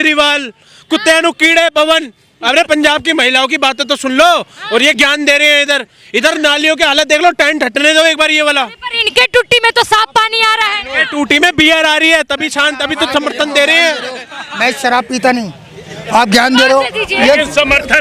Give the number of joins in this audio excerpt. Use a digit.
0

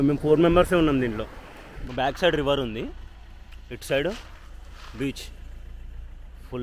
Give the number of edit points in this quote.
1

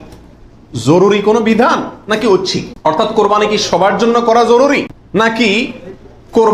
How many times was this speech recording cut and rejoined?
2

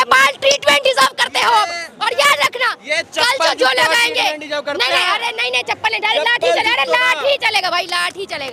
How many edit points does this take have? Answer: 0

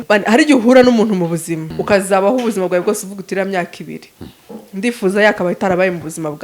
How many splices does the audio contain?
1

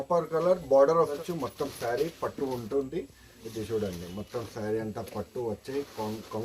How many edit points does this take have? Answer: 1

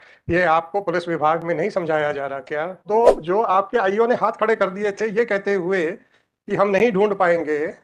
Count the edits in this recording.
1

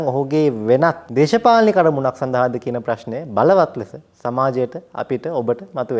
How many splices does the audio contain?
1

